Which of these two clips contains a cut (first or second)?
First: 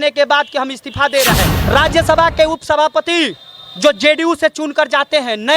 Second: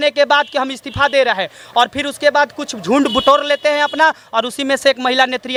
first